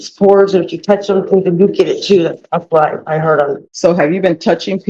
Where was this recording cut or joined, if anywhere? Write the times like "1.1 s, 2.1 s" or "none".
3.6 s